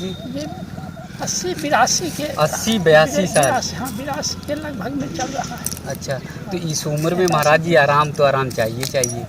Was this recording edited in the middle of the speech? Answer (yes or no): yes